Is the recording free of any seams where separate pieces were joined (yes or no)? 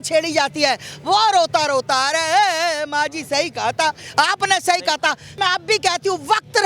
yes